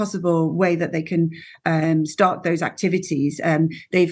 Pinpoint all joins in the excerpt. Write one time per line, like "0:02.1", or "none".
none